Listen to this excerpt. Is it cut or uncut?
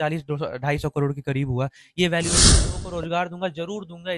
cut